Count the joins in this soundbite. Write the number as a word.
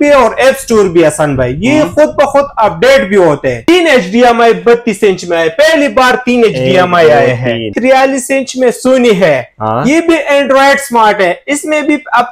two